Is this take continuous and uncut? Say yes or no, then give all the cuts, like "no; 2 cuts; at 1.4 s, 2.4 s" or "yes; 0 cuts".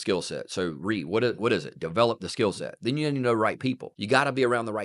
no; 1 cut; at 3.9 s